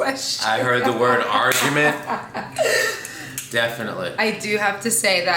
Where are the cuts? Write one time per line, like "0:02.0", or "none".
0:04.1

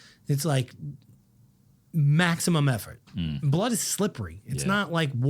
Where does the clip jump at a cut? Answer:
0:03.4

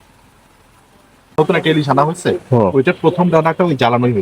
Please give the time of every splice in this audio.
0:01.2

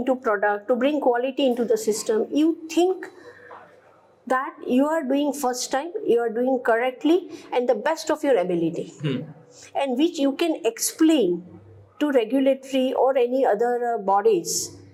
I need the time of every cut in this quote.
none

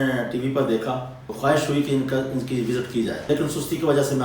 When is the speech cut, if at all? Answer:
0:01.3
0:03.2

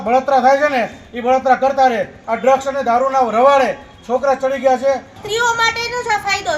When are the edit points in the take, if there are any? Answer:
0:02.2
0:05.1

